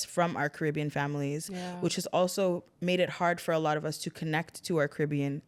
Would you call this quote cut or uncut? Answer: uncut